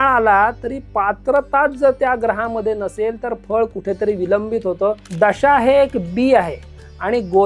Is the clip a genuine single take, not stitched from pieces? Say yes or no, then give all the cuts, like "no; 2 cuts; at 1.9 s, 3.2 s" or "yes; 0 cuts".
no; 1 cut; at 5.1 s